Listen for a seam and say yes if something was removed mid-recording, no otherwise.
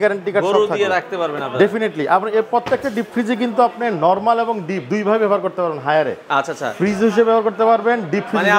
no